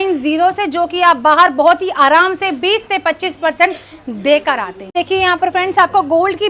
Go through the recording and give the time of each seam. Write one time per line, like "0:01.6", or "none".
0:04.7